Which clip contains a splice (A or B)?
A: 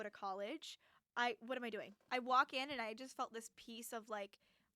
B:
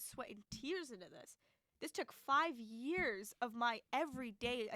A